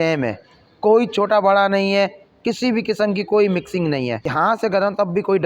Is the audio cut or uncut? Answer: cut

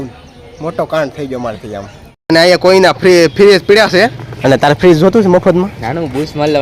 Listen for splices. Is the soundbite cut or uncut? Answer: cut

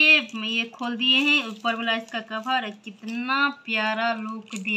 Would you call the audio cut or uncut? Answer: uncut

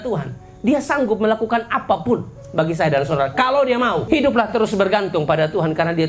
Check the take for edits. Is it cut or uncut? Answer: cut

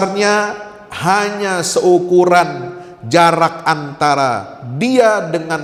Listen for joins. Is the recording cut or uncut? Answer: uncut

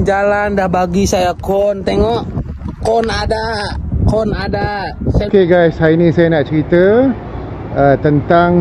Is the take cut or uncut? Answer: cut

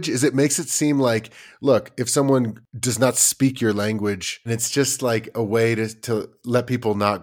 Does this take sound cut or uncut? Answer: cut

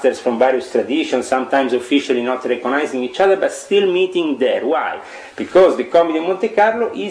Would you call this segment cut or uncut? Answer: uncut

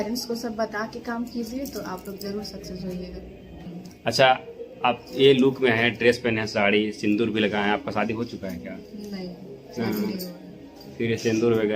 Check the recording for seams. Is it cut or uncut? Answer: cut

